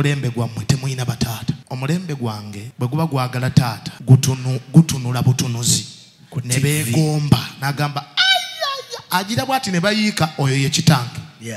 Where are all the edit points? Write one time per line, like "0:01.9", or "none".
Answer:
0:01.7
0:02.6
0:03.9